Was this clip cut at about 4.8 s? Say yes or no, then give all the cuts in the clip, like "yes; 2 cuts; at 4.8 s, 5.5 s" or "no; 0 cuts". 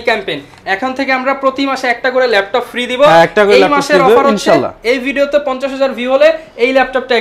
no; 0 cuts